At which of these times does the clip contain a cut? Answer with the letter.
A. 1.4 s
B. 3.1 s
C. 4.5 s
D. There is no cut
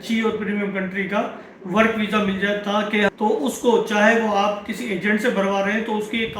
B